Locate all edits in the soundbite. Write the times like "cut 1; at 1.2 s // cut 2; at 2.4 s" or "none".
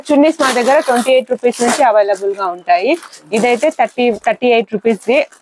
none